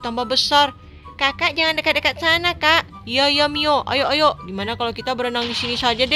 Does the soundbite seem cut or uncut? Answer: uncut